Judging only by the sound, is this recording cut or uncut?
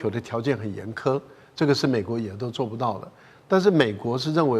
uncut